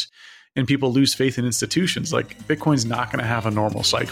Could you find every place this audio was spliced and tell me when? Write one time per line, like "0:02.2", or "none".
none